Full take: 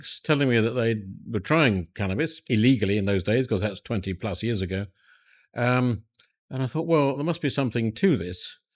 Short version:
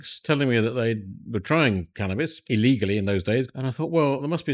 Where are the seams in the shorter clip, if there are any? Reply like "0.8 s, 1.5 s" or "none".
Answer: 3.5 s